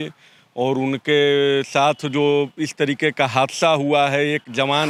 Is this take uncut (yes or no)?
yes